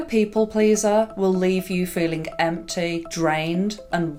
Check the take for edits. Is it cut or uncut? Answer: uncut